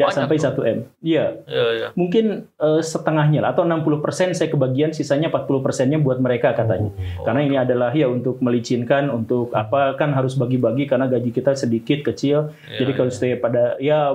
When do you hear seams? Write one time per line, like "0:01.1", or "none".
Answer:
none